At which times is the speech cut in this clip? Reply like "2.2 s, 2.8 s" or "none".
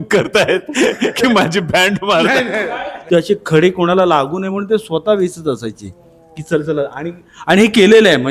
2.9 s